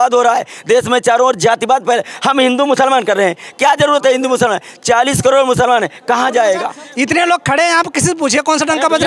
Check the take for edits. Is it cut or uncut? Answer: cut